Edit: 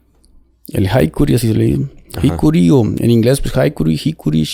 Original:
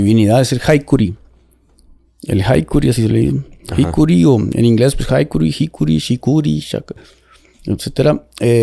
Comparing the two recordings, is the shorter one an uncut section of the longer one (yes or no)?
yes